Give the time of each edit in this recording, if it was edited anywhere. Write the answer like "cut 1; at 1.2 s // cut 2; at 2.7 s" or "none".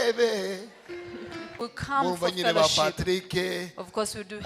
cut 1; at 1.6 s